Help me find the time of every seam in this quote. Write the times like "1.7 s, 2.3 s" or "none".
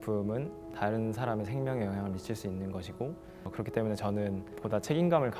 3.5 s